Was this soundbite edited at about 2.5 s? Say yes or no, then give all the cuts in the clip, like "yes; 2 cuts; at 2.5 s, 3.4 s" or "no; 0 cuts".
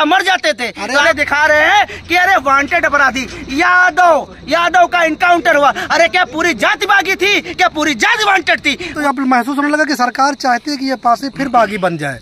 no; 2 cuts; at 1.0 s, 9.0 s